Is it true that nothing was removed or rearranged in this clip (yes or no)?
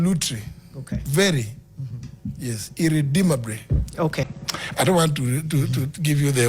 no